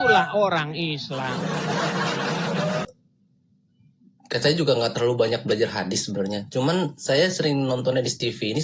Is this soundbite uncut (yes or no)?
no